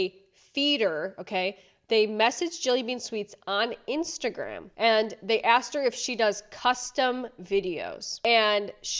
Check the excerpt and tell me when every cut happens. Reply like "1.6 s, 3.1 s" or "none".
none